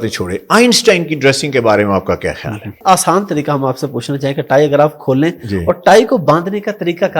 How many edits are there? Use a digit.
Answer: 1